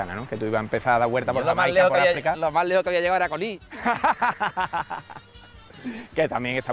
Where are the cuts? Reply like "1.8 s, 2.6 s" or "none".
none